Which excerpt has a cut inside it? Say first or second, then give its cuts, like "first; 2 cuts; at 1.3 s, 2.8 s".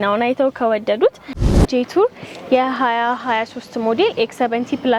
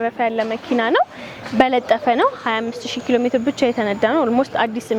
first; 1 cut; at 1.6 s